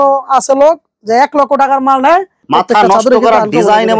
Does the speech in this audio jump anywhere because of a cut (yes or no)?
yes